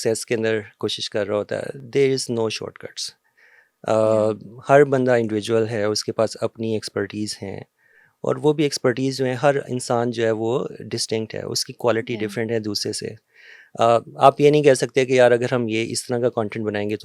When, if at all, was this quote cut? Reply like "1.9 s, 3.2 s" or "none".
none